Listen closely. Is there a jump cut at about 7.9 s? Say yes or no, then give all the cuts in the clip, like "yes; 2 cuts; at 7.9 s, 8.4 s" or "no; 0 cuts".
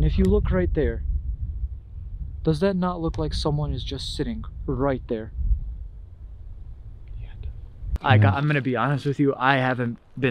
yes; 1 cut; at 7.9 s